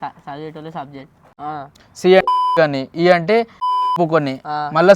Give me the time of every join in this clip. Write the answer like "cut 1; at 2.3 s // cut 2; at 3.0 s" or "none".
cut 1; at 1.3 s // cut 2; at 3.9 s